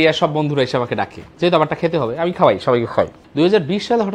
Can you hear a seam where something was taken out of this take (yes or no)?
yes